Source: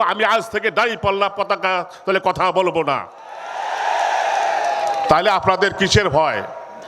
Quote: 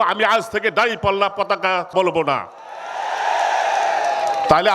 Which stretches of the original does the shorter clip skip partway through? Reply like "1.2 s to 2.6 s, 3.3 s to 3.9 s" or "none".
1.9 s to 2.5 s